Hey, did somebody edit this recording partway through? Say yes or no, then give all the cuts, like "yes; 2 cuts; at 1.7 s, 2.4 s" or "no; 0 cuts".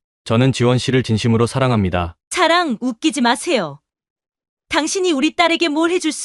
yes; 1 cut; at 2.2 s